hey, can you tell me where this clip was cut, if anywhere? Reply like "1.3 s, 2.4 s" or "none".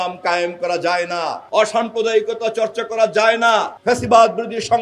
1.4 s, 3.7 s